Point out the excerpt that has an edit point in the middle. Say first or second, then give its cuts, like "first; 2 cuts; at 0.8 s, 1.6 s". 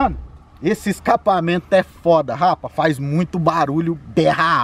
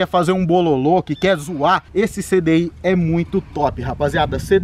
second; 1 cut; at 1.9 s